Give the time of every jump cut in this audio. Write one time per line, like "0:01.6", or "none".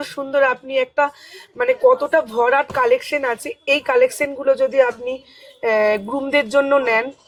none